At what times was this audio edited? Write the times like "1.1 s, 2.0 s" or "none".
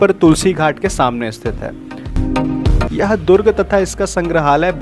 2.8 s

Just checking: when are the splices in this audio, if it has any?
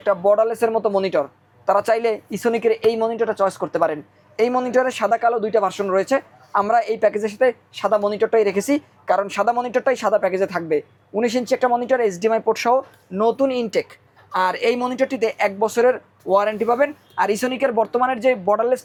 none

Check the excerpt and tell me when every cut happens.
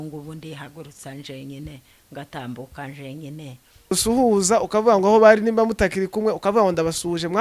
3.9 s

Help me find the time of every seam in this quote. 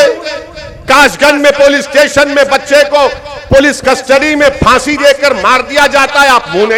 none

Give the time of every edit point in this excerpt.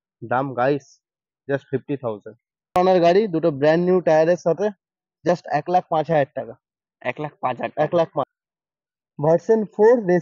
2.8 s, 8.3 s

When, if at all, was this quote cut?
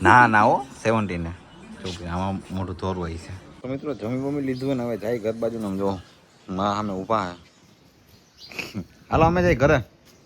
3.6 s

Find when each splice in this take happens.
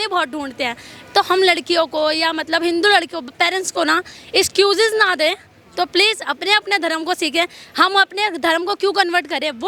none

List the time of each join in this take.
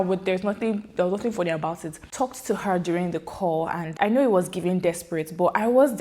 2.1 s, 3.9 s

